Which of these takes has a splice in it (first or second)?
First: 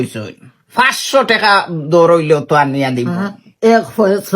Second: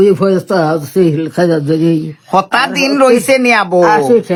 first